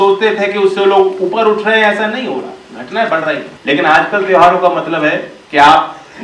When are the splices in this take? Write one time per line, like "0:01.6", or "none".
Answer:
0:03.5
0:05.3